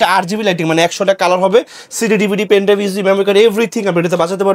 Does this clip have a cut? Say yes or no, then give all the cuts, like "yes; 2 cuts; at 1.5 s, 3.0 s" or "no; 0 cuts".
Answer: no; 0 cuts